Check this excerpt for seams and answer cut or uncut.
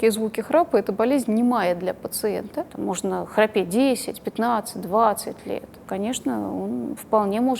cut